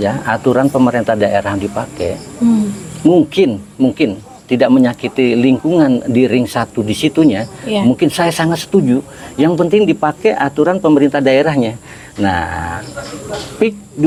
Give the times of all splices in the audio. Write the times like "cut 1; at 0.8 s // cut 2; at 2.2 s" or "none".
none